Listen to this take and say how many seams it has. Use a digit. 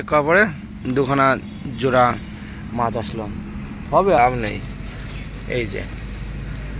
1